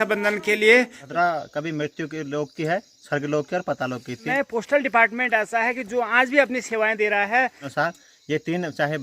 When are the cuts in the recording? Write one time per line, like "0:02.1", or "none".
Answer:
0:01.0
0:04.2
0:07.7

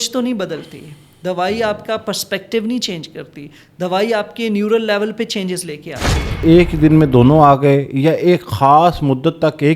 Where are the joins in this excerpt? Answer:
0:06.3

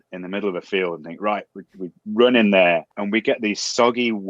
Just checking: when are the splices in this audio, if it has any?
0:02.9

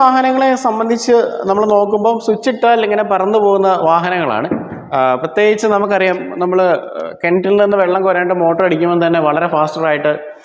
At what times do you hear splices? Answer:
none

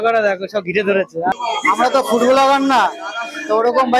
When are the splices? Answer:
0:01.3

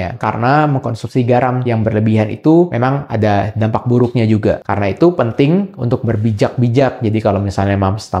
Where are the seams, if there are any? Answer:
0:04.6

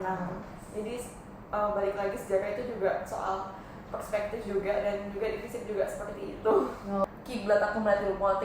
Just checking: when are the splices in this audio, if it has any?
0:07.1

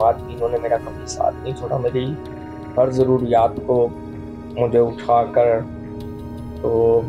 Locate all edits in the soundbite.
none

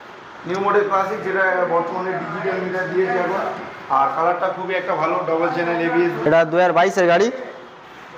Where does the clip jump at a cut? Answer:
0:06.2

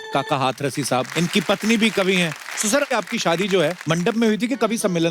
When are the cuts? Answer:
0:01.1
0:02.9
0:03.8

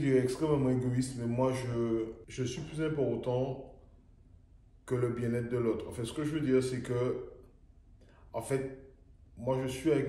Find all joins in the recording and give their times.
0:02.2

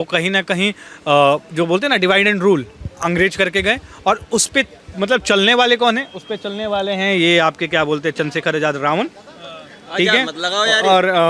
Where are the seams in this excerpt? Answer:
none

